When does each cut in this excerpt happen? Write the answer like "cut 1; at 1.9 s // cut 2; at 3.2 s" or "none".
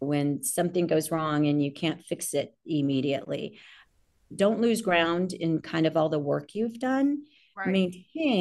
none